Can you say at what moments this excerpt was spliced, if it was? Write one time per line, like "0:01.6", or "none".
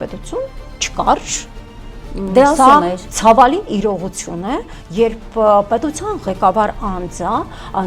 none